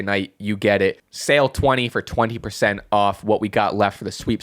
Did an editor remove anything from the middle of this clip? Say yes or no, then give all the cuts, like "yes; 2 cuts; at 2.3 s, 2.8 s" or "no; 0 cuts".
yes; 1 cut; at 1.1 s